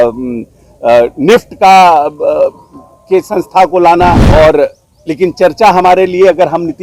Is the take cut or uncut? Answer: cut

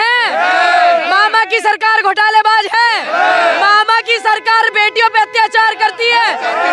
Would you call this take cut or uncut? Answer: uncut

